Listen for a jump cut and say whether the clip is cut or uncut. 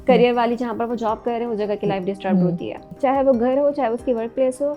cut